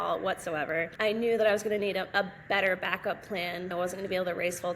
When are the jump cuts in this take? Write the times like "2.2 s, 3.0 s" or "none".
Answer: 0.9 s, 3.7 s